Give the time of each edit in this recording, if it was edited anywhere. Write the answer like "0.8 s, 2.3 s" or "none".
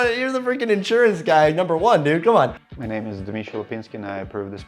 2.6 s